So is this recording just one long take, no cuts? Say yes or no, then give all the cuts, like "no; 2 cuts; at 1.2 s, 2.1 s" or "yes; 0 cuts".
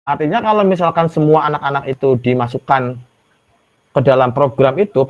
yes; 0 cuts